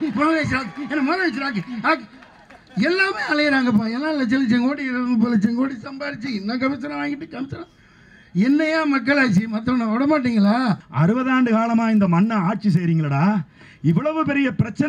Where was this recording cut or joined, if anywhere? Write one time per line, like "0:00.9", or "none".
0:10.9

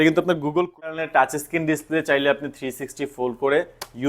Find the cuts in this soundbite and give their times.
0:00.9

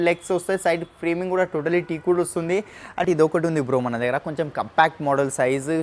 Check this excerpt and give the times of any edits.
0:03.1

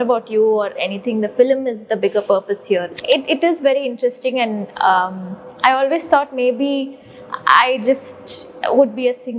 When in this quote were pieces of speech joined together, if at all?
0:02.9

